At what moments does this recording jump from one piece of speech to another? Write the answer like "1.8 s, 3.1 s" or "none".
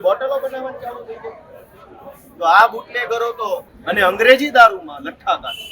3.7 s